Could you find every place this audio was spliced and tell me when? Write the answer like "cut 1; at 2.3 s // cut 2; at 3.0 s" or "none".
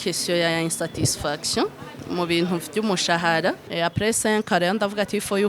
cut 1; at 2.0 s // cut 2; at 3.6 s